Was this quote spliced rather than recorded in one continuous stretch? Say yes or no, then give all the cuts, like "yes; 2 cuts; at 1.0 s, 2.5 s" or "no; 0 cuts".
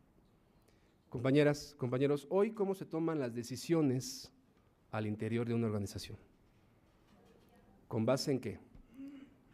yes; 1 cut; at 4.9 s